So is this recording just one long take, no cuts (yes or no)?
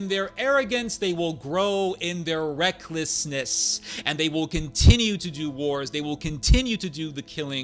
yes